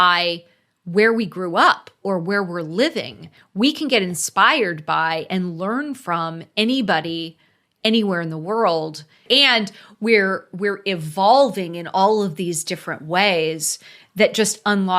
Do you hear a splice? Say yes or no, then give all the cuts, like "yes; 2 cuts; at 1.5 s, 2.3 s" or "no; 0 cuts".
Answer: yes; 1 cut; at 9.2 s